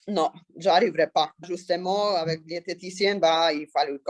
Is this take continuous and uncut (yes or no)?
no